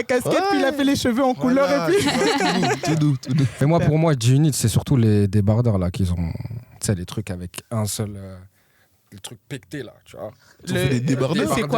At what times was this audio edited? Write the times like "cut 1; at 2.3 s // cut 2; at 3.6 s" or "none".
cut 1; at 3.5 s